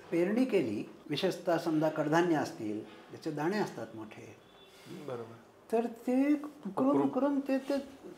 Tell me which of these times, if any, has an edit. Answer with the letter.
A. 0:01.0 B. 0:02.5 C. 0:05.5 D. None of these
A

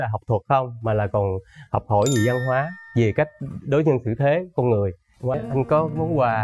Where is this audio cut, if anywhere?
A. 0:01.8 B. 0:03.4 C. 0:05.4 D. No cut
C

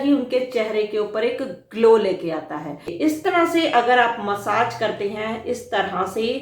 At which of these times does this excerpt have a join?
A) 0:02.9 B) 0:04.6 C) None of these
A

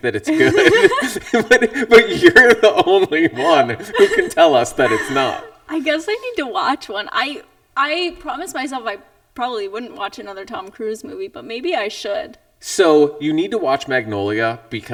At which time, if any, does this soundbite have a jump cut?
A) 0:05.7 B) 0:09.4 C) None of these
C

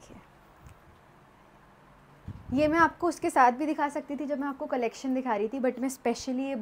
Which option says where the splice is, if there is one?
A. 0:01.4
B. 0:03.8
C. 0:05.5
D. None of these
D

